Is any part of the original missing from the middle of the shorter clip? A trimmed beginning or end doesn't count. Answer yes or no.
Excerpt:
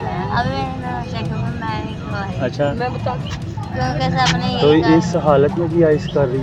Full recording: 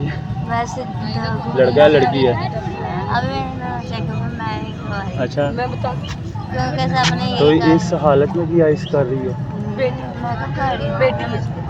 no